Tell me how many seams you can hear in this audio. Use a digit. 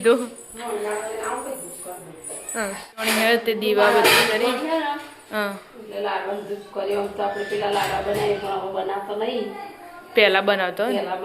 1